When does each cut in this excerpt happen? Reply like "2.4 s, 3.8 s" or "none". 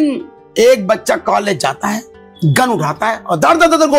none